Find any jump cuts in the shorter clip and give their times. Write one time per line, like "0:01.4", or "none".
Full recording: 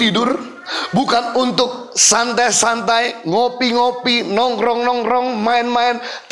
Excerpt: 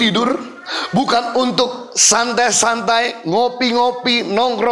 none